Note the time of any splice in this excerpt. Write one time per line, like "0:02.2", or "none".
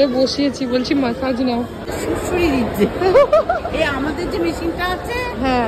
0:01.8